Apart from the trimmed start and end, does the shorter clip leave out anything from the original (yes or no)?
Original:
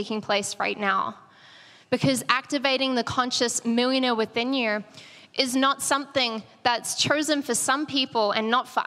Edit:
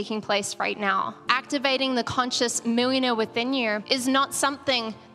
yes